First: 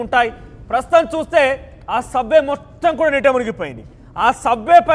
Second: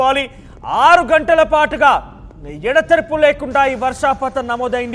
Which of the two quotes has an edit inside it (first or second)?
first